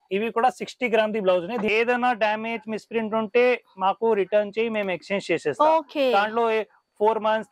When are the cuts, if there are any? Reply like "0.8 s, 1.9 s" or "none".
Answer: 1.7 s

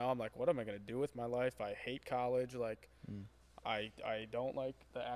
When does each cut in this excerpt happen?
none

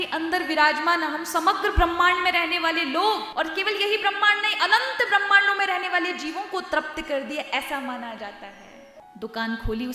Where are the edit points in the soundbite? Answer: 3.3 s, 9.0 s

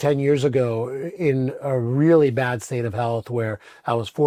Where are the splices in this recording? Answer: none

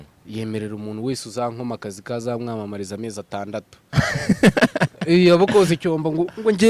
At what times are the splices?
3.8 s

